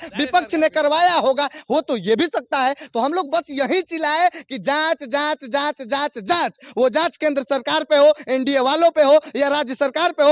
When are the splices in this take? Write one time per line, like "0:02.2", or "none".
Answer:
none